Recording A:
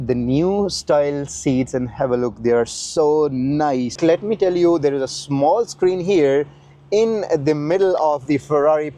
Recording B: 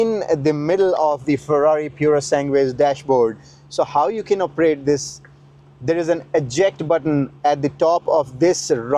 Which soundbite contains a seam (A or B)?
A